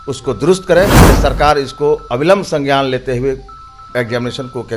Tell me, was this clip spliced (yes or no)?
yes